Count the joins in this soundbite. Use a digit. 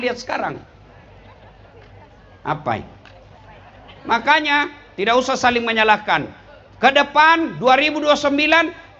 0